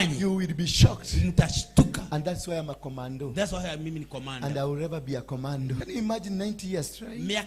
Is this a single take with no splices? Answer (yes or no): no